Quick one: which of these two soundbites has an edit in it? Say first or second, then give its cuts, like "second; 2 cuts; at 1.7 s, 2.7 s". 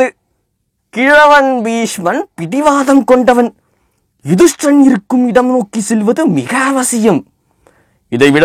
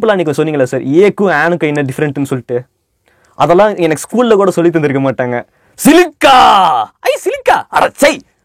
second; 1 cut; at 5.7 s